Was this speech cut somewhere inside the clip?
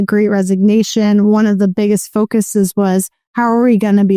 no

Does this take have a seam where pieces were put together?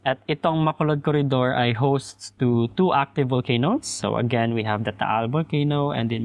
no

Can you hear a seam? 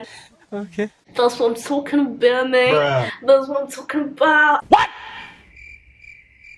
no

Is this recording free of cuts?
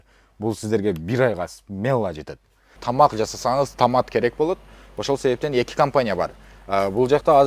no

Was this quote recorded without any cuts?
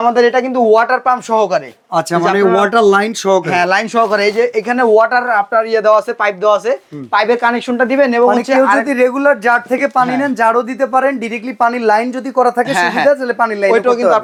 yes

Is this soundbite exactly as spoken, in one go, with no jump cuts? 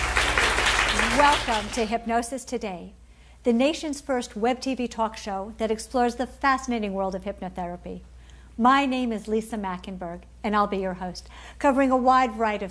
no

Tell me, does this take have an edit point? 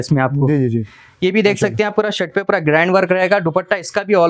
no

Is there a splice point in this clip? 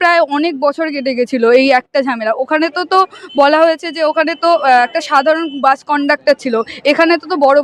no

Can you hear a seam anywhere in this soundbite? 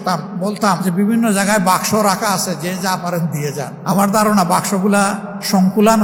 no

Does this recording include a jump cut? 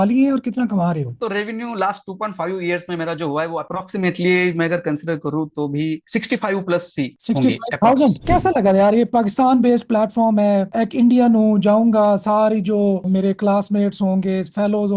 yes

